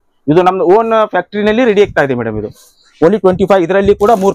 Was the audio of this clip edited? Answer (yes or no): no